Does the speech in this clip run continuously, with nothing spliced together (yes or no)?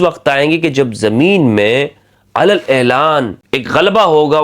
no